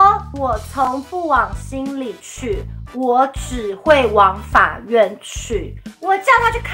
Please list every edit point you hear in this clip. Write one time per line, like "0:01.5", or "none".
none

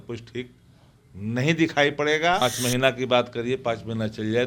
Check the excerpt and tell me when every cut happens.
0:02.4

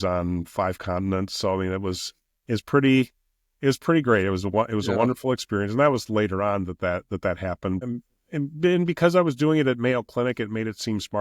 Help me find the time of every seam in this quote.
0:07.8

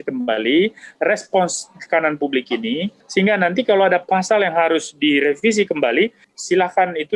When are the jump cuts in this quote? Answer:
0:03.0
0:06.2

